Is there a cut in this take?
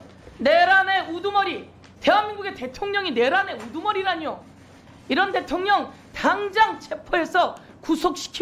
no; 0 cuts

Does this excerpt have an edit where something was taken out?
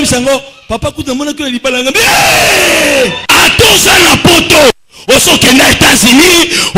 yes; 1 cut; at 3.2 s

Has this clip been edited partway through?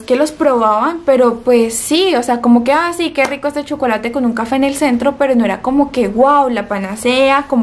no; 0 cuts

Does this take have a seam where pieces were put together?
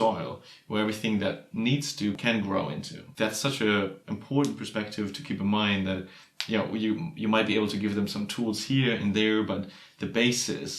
yes; 3 cuts; at 2.2 s, 3.0 s, 4.1 s

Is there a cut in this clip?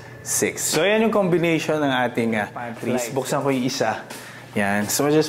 yes; 1 cut; at 2.7 s

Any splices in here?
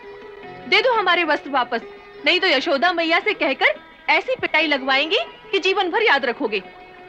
no; 0 cuts

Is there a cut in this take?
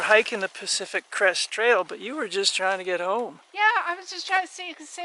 no; 0 cuts

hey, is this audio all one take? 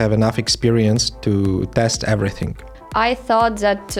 no; 1 cut; at 2.7 s

